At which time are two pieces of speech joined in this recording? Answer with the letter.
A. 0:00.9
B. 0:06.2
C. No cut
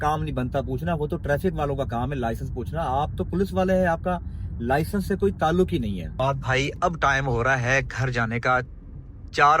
B